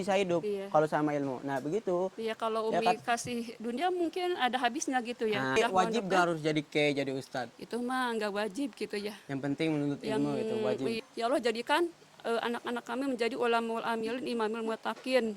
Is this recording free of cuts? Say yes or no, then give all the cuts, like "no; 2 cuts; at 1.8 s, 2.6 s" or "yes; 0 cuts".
no; 2 cuts; at 5.6 s, 11.0 s